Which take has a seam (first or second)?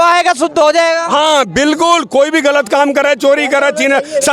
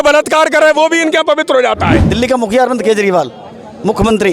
second